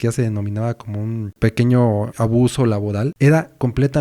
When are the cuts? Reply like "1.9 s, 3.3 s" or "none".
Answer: 1.3 s, 2.1 s, 3.1 s